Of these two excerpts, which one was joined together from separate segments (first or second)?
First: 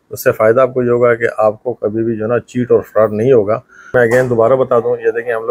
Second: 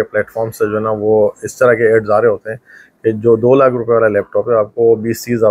first